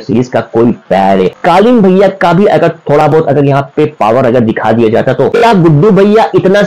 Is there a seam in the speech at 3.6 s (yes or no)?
no